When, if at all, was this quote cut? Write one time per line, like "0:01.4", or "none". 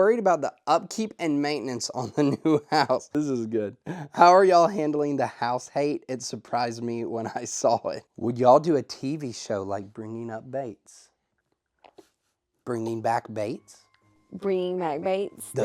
0:03.1
0:08.1